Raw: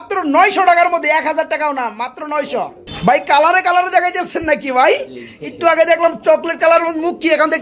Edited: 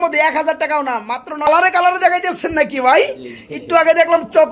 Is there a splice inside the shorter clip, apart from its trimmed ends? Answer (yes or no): yes